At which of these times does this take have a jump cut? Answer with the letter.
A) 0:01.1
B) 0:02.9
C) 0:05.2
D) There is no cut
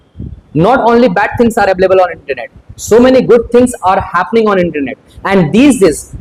D